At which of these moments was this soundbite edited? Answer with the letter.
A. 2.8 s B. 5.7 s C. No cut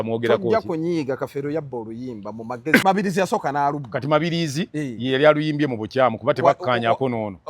A